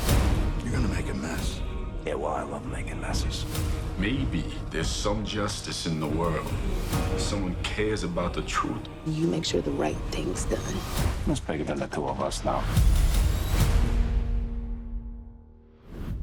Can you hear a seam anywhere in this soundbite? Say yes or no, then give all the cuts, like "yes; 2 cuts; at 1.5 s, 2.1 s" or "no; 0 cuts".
no; 0 cuts